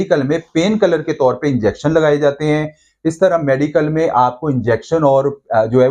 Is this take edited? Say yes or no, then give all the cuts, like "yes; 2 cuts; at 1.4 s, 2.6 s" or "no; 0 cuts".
no; 0 cuts